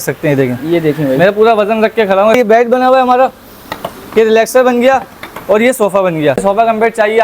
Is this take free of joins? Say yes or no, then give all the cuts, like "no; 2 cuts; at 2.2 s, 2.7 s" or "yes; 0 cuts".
no; 2 cuts; at 2.4 s, 6.4 s